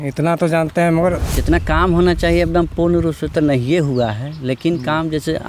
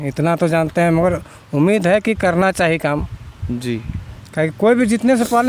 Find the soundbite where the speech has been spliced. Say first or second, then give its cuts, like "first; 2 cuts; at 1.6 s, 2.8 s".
first; 1 cut; at 1.3 s